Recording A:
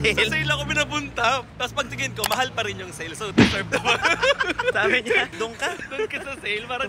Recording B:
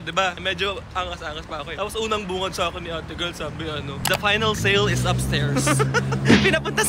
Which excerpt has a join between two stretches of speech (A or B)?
A